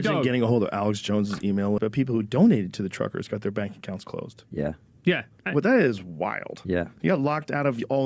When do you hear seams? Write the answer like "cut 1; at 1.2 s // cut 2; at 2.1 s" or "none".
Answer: cut 1; at 1.8 s